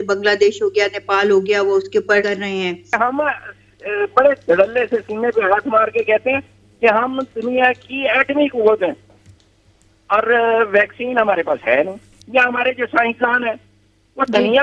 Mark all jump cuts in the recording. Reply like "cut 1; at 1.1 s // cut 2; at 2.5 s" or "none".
cut 1; at 2.7 s // cut 2; at 12.2 s